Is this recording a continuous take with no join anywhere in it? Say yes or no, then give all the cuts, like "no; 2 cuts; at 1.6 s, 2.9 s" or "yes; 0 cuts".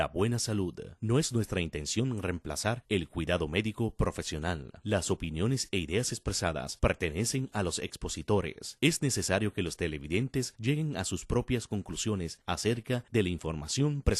yes; 0 cuts